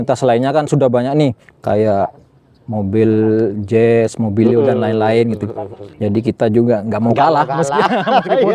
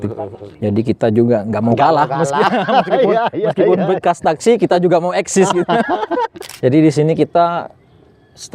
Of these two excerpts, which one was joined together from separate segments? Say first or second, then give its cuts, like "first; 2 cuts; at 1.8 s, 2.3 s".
second; 1 cut; at 6.4 s